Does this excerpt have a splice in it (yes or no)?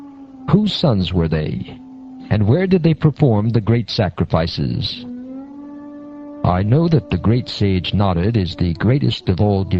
yes